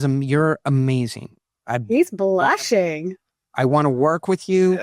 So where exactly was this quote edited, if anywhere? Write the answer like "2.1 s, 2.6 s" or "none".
none